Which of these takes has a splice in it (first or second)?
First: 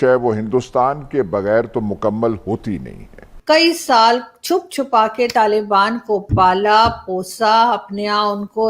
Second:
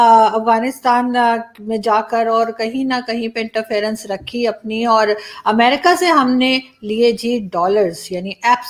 first